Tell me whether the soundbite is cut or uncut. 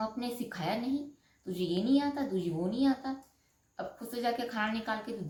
uncut